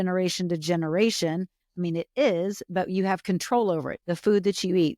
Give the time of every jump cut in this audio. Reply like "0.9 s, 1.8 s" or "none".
3.9 s